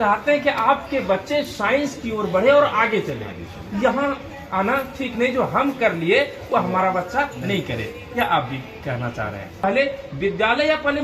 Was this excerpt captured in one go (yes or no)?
no